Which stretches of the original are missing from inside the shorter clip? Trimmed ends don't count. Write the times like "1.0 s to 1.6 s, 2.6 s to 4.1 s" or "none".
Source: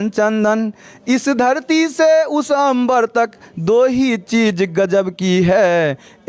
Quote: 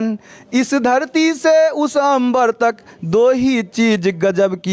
none